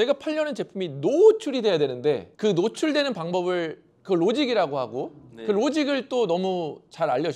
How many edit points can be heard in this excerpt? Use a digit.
1